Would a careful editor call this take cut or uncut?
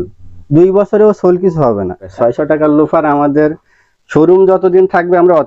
cut